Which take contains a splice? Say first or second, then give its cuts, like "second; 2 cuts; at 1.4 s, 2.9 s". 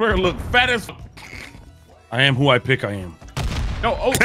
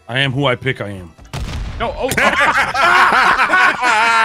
first; 1 cut; at 0.9 s